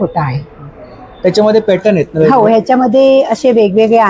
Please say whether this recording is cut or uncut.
uncut